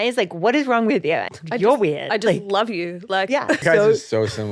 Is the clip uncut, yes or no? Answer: no